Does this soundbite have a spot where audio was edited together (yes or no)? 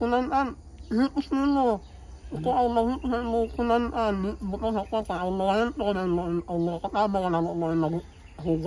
no